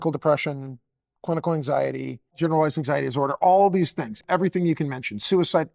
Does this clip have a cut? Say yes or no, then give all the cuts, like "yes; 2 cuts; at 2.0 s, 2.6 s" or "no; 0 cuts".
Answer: yes; 2 cuts; at 2.3 s, 4.2 s